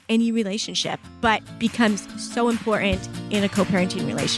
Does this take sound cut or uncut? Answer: cut